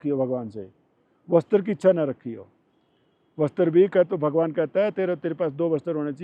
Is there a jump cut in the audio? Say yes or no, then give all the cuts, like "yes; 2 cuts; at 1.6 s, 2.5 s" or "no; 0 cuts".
no; 0 cuts